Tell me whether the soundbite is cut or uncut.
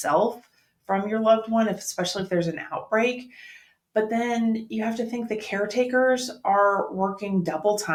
uncut